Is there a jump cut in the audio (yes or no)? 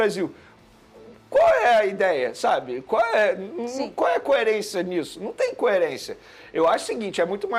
no